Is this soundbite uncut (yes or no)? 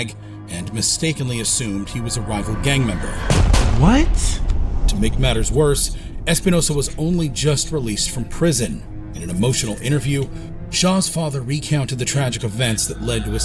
yes